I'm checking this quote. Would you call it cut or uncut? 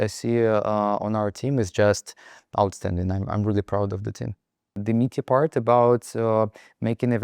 cut